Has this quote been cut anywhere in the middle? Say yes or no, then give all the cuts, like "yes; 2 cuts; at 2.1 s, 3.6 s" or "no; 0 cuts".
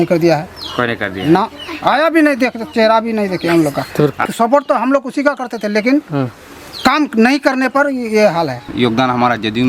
yes; 2 cuts; at 4.2 s, 8.6 s